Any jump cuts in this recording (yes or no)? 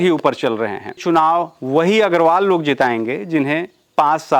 yes